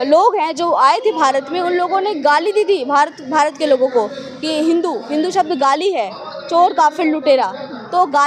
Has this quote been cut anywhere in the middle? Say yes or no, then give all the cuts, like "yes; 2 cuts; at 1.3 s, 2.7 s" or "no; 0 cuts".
no; 0 cuts